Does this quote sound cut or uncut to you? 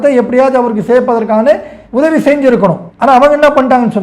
cut